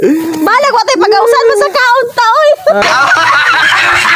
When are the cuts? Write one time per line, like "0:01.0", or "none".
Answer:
none

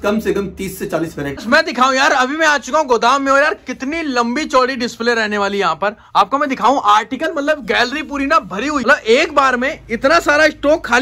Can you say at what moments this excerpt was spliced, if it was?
0:01.4
0:08.8

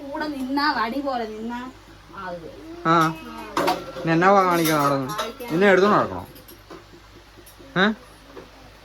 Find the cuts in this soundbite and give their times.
none

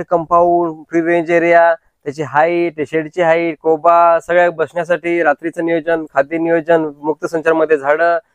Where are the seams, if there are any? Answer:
none

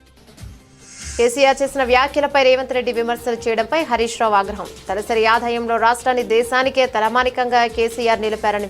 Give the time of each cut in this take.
0:01.1

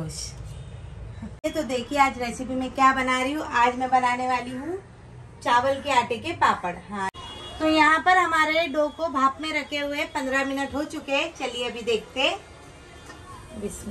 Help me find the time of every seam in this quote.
0:01.4
0:07.1

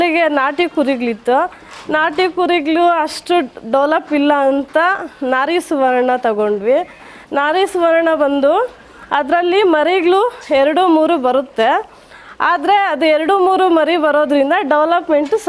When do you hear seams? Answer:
none

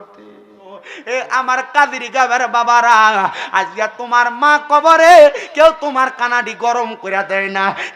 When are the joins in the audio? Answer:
0:00.9

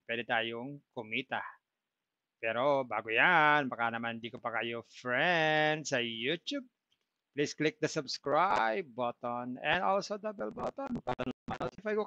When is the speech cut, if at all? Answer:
none

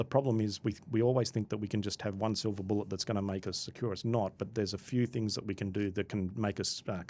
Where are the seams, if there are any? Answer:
none

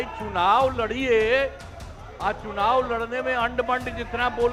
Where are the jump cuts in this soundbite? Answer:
none

